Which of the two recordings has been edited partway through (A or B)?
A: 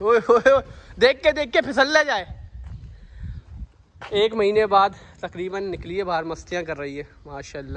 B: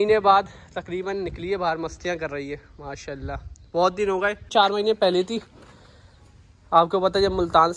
B